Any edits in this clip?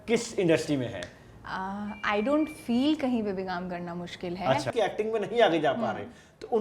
yes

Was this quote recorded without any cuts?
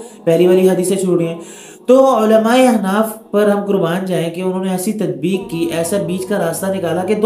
yes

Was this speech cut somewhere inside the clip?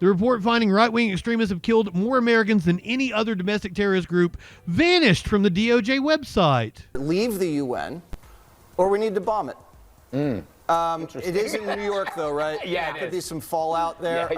yes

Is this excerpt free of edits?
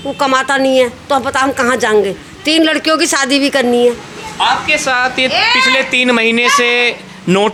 yes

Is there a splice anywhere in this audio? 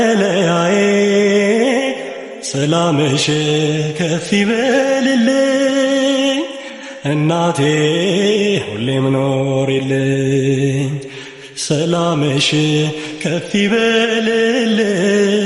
no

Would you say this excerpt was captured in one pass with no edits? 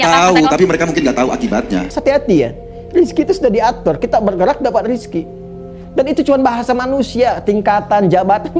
no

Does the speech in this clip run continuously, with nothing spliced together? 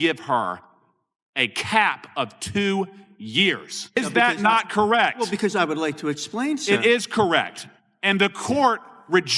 no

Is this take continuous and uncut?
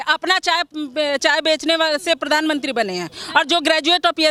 yes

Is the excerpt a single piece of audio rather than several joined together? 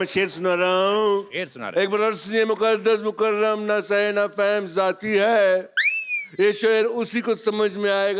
yes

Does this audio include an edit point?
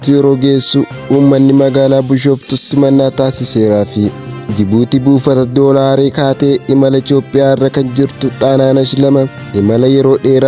yes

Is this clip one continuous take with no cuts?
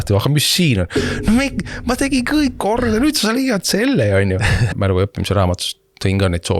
no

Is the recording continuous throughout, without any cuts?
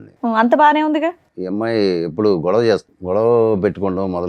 no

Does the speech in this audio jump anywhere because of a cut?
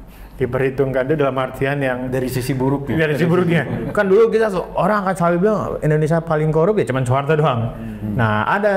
no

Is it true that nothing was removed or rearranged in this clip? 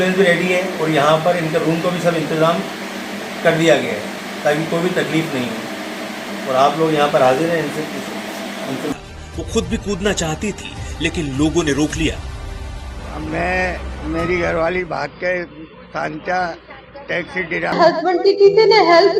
no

